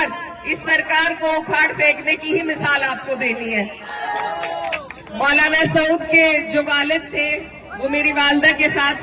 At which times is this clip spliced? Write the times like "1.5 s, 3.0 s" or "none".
3.9 s

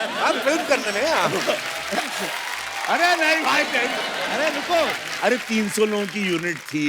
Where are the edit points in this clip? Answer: none

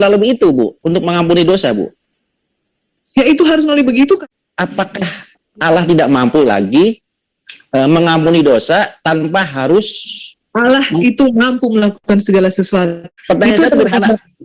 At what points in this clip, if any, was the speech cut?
4.2 s, 13.1 s

